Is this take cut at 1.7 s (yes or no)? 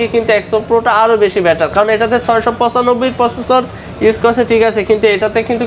no